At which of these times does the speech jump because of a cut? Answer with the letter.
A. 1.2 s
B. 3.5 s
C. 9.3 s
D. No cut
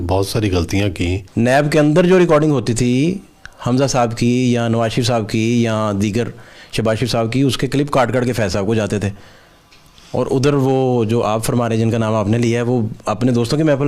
A